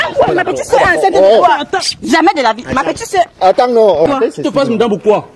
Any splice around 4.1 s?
yes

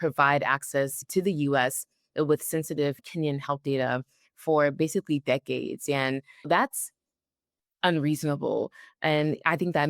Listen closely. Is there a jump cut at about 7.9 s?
no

